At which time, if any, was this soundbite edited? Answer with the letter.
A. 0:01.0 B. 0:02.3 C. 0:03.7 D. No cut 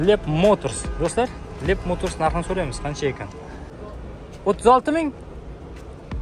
C